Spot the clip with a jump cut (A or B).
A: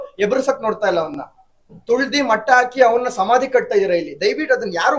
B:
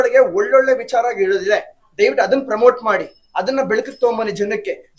A